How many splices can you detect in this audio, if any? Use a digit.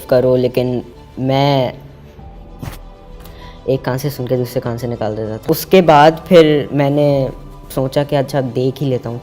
2